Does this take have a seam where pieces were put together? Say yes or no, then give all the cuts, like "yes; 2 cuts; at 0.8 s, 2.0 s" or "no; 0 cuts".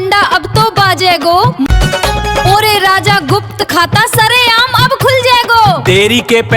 no; 0 cuts